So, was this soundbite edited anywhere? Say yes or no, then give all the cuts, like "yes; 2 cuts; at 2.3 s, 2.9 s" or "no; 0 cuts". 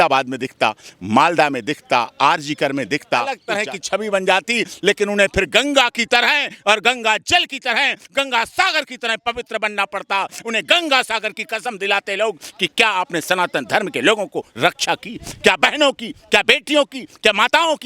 yes; 1 cut; at 3.4 s